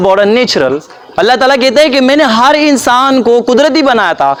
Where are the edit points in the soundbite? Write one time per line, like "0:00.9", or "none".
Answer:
none